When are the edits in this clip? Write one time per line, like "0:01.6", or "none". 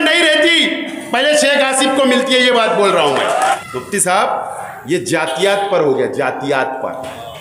0:03.6